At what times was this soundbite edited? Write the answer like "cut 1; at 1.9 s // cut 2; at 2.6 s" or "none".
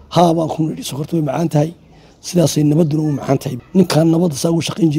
cut 1; at 3.6 s